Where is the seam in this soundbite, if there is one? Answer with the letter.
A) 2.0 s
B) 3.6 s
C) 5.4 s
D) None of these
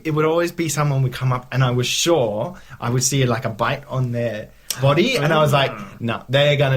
D